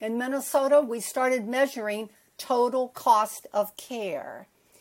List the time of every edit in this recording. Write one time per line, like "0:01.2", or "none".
none